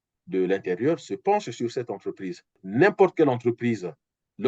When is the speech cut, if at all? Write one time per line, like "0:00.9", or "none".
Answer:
0:02.6